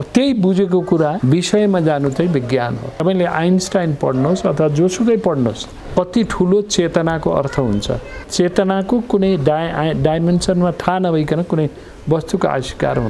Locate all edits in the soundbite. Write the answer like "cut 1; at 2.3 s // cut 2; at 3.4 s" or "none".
cut 1; at 1.2 s // cut 2; at 3.0 s // cut 3; at 5.7 s // cut 4; at 8.1 s

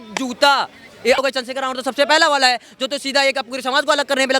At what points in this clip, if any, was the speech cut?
cut 1; at 1.2 s

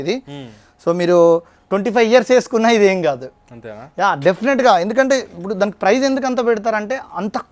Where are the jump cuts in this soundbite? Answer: none

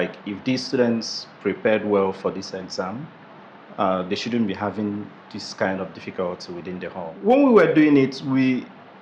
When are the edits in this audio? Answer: cut 1; at 7.2 s

